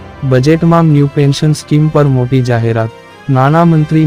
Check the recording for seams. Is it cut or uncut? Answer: uncut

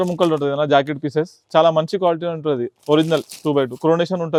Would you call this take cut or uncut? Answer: uncut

